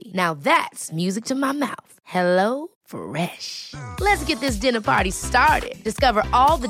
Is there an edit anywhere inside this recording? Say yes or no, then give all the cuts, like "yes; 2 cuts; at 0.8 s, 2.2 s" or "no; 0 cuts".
no; 0 cuts